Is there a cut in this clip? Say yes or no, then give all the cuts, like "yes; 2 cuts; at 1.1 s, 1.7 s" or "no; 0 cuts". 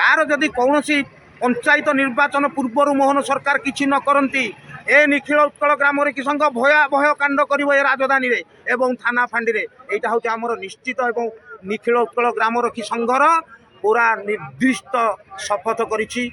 no; 0 cuts